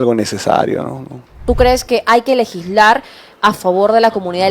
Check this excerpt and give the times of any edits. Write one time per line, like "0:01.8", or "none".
0:01.4